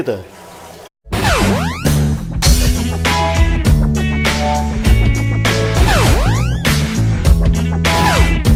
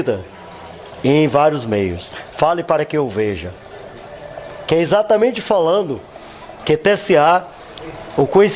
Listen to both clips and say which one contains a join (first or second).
second